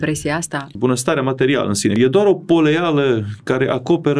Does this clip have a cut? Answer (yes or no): yes